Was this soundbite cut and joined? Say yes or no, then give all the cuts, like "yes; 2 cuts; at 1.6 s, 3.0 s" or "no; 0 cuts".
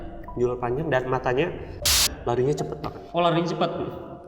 yes; 1 cut; at 2.0 s